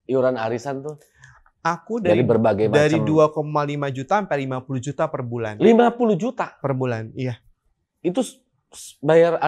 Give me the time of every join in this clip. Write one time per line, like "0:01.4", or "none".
none